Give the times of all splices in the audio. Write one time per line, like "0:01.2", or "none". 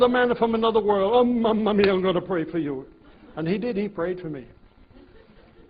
none